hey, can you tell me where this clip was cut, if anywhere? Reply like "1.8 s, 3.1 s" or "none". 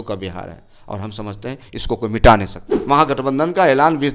2.7 s